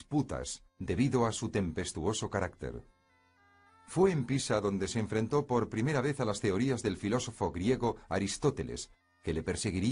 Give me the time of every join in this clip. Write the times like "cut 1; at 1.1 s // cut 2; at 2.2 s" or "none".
cut 1; at 3.4 s